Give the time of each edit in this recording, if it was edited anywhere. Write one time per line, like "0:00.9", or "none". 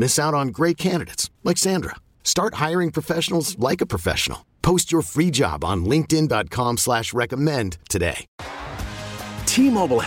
0:08.3